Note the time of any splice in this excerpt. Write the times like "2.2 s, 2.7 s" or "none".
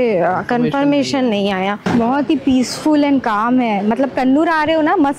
1.9 s